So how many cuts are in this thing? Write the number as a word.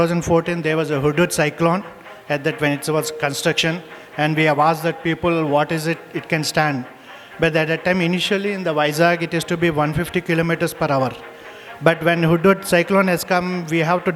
zero